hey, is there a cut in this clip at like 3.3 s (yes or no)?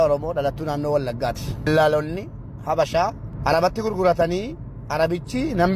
yes